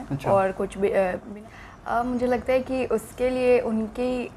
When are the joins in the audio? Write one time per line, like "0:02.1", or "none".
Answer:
0:01.2